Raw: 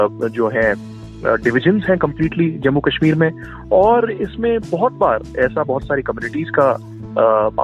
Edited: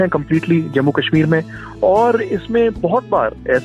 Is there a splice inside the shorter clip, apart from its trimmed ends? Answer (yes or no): no